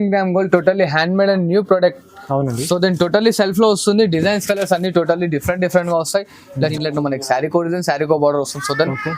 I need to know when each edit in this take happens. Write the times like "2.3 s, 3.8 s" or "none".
6.7 s

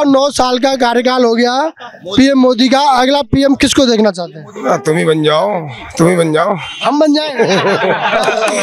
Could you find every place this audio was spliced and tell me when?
none

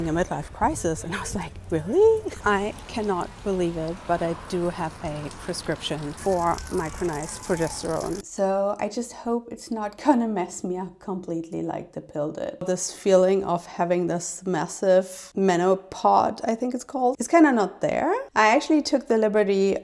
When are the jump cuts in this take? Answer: 2.3 s, 6.2 s, 8.3 s, 12.6 s, 18.2 s

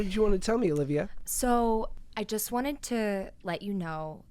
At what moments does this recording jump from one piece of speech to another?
1.2 s, 2.0 s

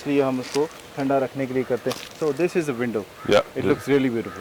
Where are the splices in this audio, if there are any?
none

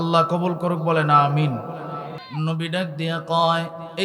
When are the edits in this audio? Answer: 2.2 s

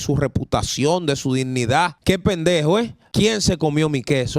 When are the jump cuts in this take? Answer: 2.0 s, 3.0 s

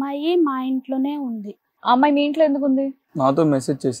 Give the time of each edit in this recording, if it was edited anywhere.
3.1 s

